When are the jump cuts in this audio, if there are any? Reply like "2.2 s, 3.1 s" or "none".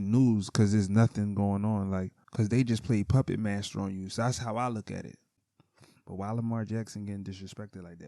2.2 s, 5.2 s